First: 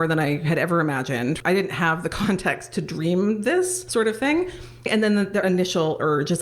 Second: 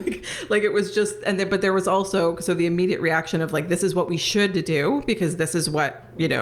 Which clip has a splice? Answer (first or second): first